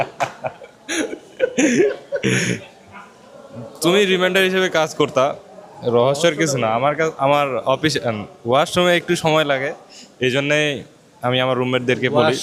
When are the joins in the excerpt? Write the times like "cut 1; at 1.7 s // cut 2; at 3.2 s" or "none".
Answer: none